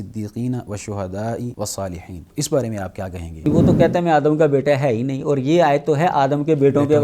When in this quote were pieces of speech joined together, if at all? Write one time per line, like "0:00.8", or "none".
0:01.7
0:03.5

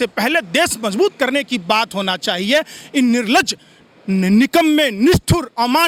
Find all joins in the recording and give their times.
none

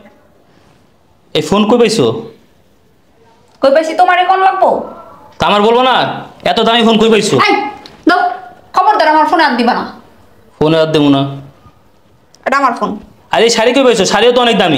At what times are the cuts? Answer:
none

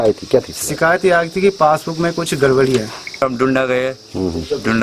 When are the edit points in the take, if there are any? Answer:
0:03.2

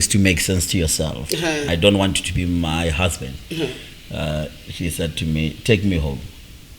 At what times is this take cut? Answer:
0:01.7

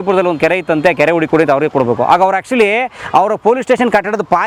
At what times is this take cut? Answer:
none

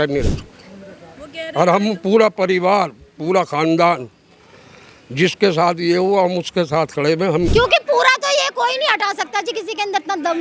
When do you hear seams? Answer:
0:07.5

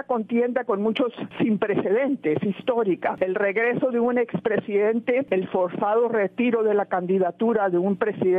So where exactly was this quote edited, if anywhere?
0:01.2
0:03.1
0:05.3

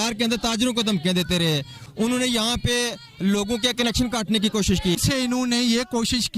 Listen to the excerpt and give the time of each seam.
0:01.8
0:05.0

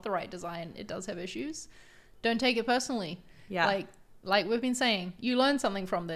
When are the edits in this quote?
none

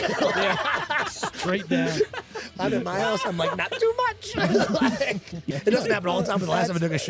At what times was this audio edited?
0:05.4

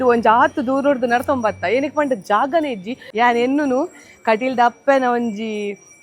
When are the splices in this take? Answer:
0:03.0

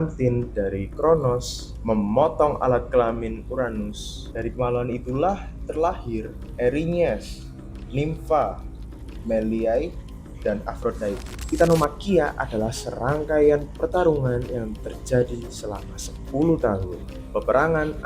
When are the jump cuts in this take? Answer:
0:11.4

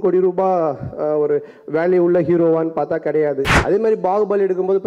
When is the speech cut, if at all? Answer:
0:03.5

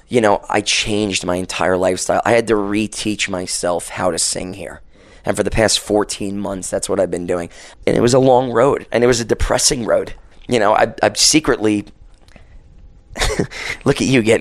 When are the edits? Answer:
0:07.7
0:10.2

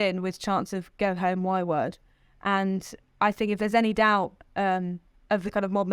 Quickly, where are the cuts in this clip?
none

